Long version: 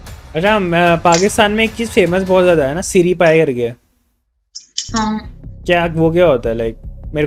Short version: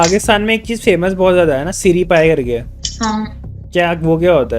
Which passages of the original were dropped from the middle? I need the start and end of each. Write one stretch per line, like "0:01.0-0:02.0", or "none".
0:03.9-0:04.7